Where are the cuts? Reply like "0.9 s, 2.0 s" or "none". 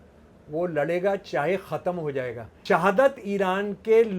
2.5 s